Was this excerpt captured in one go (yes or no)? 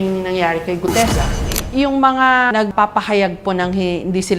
no